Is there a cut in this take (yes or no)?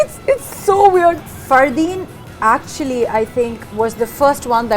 yes